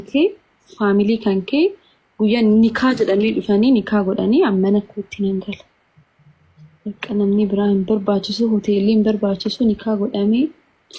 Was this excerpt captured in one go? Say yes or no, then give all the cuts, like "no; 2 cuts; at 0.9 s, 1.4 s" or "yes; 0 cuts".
yes; 0 cuts